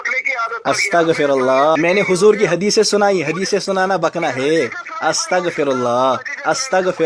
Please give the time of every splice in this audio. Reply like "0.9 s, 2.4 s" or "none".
1.8 s